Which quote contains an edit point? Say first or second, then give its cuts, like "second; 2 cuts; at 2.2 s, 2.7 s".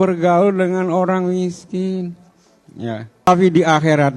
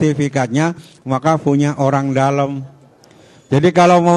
first; 1 cut; at 3.3 s